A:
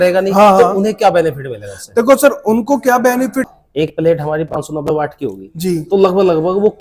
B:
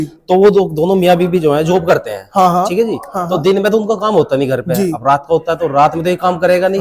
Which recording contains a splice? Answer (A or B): A